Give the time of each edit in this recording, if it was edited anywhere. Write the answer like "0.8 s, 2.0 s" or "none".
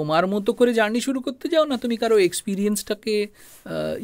none